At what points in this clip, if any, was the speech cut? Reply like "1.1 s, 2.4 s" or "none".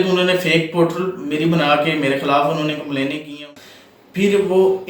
3.3 s